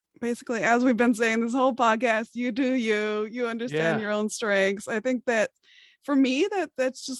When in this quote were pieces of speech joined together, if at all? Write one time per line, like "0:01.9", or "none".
none

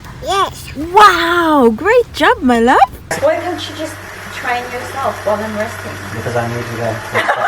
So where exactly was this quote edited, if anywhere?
0:03.0

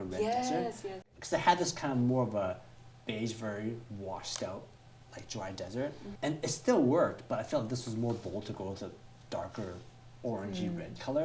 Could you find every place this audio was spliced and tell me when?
0:01.1
0:06.1

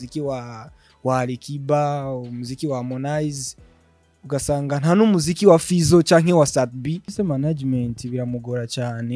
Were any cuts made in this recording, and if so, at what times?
0:07.1

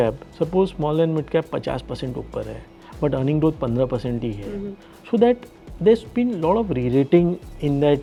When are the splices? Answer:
none

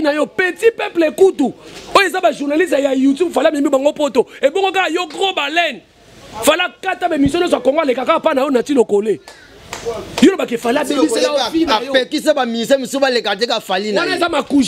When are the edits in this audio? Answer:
none

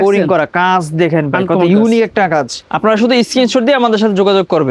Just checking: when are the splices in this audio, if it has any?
0:02.6

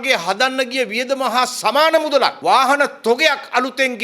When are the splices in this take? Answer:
0:02.4

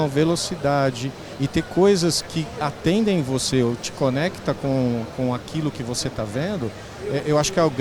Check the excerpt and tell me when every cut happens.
none

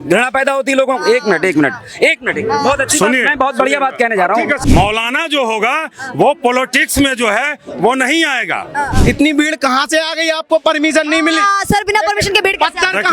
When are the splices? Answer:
0:04.6
0:08.9

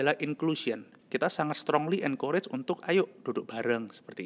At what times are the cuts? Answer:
0:00.9

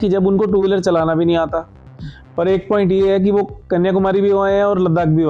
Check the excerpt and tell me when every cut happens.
none

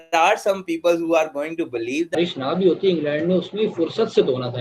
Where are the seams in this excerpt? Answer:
0:02.1

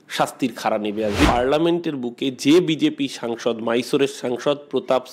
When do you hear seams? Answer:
0:01.3

